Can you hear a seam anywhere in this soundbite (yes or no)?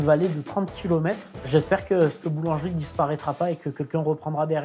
yes